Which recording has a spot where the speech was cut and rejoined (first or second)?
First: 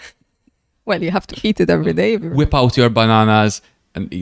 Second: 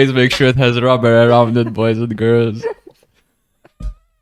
first